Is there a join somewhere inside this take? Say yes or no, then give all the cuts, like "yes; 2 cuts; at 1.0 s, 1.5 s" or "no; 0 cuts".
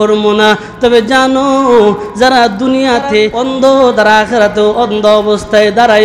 yes; 1 cut; at 3.4 s